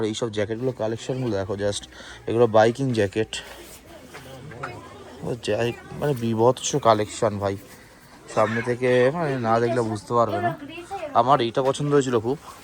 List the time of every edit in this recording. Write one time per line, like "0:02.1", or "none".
none